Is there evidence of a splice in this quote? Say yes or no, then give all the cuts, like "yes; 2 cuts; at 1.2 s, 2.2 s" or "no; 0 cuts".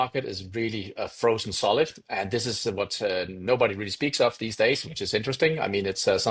no; 0 cuts